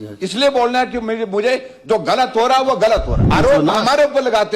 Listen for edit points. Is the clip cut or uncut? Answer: cut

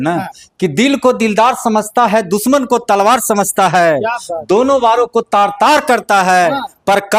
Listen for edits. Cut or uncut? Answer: uncut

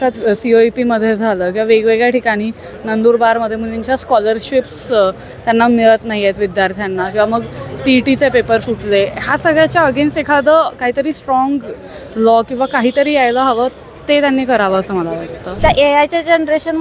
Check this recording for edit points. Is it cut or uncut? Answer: cut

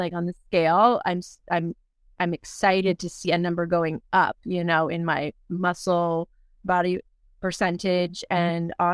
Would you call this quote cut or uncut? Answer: cut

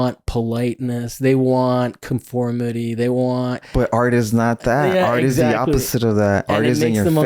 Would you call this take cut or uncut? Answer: cut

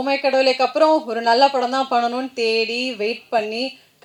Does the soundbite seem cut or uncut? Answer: uncut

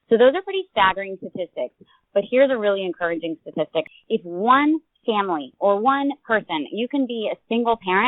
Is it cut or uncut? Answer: cut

